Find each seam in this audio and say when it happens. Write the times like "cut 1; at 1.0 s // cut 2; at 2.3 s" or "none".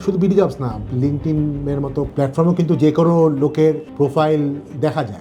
cut 1; at 2.1 s // cut 2; at 3.9 s